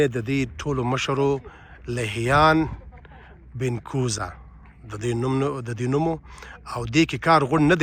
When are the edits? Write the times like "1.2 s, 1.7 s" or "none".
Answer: none